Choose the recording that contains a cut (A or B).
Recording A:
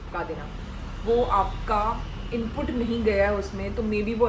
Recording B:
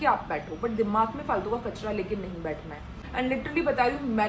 B